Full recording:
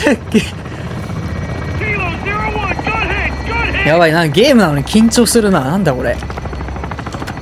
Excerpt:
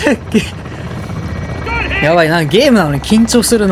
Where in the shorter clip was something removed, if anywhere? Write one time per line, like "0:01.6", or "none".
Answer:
0:01.6